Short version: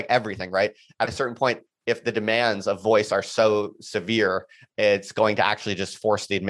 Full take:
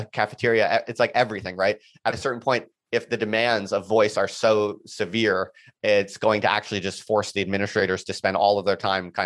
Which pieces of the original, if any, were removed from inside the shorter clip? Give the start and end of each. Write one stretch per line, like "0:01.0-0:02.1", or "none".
none